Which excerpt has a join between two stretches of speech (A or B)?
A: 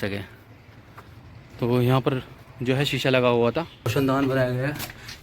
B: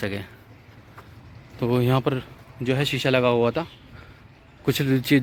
A